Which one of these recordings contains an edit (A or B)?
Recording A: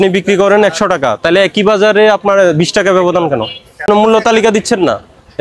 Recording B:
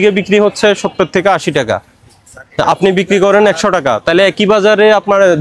A